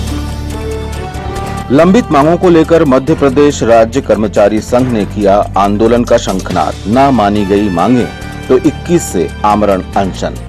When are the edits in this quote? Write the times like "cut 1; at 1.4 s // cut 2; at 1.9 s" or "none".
cut 1; at 0.9 s

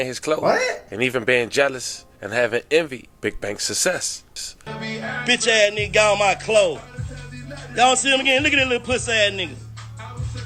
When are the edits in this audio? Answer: none

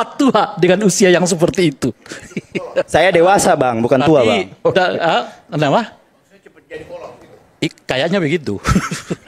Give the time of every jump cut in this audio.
none

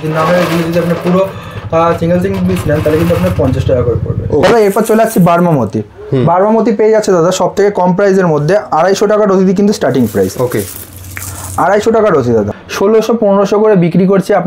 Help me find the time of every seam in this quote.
cut 1; at 4.4 s // cut 2; at 12.5 s

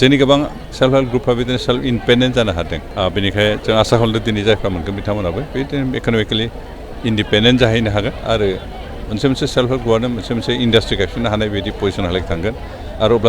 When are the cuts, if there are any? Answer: cut 1; at 2.8 s

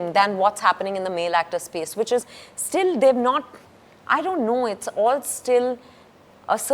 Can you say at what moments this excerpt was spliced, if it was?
none

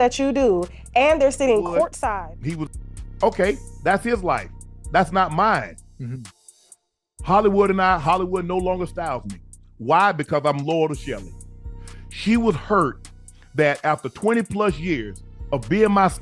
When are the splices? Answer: cut 1; at 2.0 s

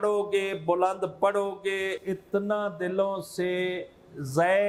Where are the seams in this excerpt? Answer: none

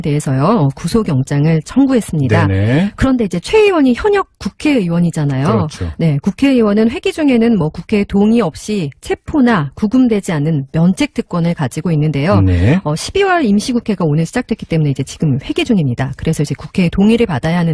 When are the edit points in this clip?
none

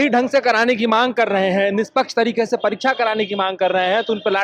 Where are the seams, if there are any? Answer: none

